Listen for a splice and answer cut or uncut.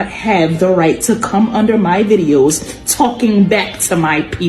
uncut